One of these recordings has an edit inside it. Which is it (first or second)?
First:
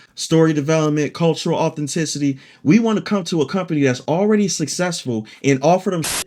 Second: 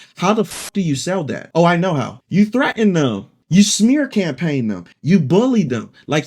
second